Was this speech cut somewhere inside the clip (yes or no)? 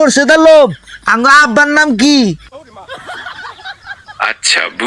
yes